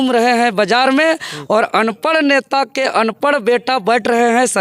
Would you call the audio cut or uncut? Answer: uncut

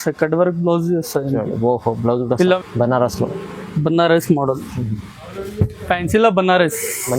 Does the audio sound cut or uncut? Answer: cut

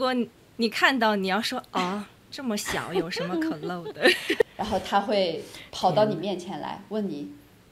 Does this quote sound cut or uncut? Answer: cut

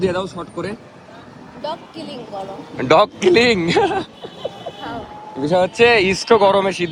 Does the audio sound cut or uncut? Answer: uncut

